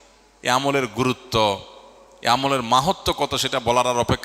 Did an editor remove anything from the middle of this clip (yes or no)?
no